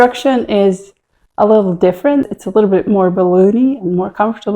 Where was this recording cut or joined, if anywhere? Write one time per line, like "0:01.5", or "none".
0:02.3